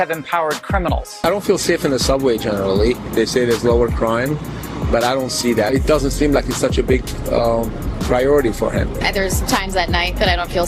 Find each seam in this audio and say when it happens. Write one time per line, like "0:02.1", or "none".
0:01.2